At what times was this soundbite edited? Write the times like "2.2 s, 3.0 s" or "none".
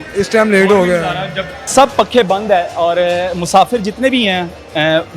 1.7 s